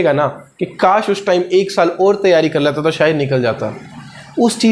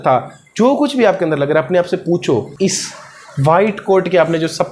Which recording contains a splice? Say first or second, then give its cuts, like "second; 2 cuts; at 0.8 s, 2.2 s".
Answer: second; 1 cut; at 2.5 s